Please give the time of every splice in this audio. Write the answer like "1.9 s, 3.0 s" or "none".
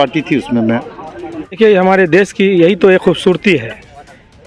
1.5 s